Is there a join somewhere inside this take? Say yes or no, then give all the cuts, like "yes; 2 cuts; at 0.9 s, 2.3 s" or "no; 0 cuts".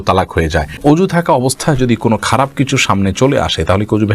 yes; 1 cut; at 1.0 s